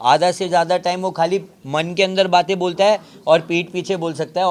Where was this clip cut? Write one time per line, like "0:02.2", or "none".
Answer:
none